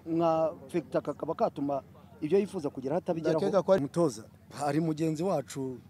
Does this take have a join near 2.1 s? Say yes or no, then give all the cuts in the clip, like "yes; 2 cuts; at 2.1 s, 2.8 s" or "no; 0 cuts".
no; 1 cut; at 3.8 s